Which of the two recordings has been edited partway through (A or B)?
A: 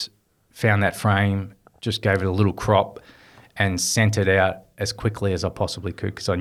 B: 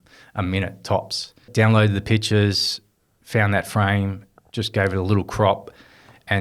B